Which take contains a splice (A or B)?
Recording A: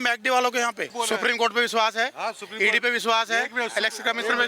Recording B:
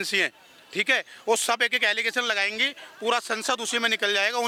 A